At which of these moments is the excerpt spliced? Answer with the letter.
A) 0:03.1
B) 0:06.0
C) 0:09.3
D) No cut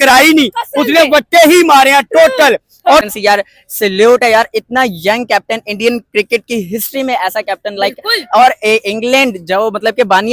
A